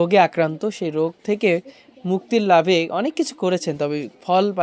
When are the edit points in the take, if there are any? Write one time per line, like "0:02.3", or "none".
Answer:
none

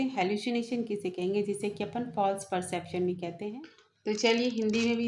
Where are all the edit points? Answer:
0:03.5

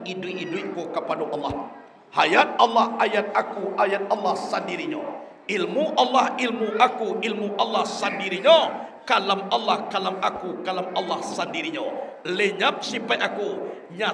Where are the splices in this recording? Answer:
none

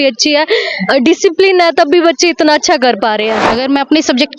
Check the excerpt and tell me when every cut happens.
0:03.4

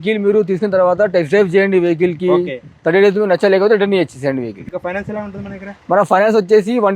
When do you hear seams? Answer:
0:04.6

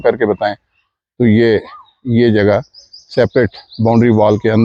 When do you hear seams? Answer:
none

